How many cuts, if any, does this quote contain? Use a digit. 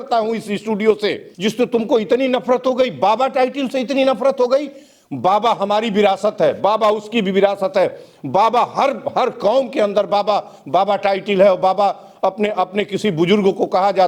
1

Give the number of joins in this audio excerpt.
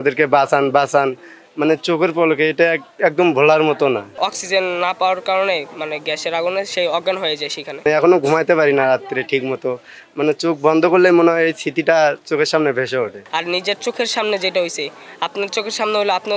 3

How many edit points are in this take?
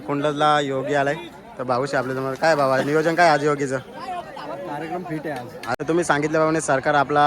1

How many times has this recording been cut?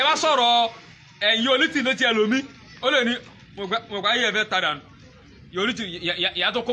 0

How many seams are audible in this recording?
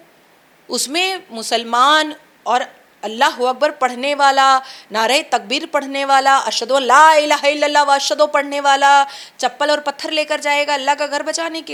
0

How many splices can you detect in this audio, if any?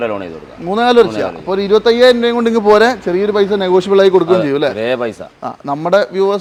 0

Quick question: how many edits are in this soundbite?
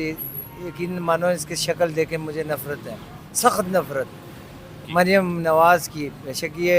1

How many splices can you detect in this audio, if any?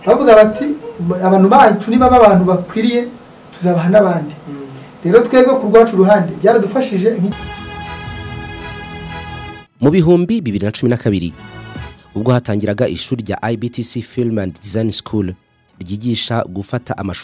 1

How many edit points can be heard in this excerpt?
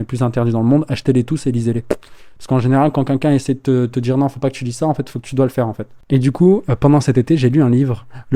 1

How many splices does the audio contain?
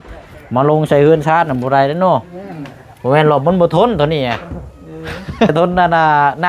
1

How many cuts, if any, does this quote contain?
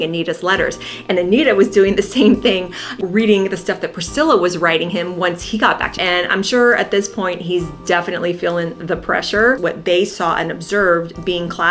2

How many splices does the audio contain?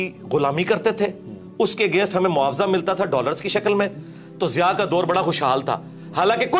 0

